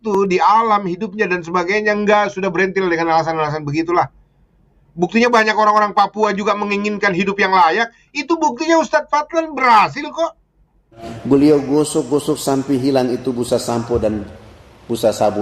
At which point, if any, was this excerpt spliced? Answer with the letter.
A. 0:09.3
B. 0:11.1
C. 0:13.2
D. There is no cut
B